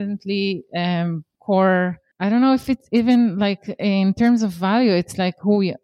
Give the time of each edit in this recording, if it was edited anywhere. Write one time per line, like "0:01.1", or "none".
0:01.3
0:02.1